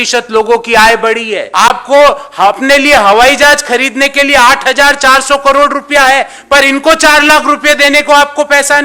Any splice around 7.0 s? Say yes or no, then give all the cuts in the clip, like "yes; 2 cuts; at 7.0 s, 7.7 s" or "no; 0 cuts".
no; 1 cut; at 1.4 s